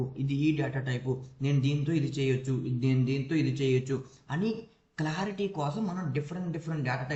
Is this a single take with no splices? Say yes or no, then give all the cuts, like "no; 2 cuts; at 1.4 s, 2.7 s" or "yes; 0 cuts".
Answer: yes; 0 cuts